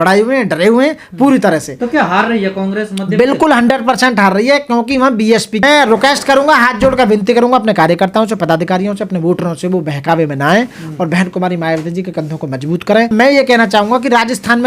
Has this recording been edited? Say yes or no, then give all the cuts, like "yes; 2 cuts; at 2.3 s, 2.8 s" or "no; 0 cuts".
yes; 2 cuts; at 5.6 s, 13.1 s